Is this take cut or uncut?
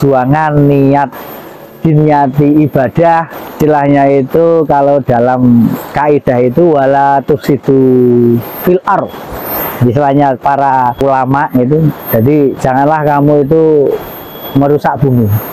uncut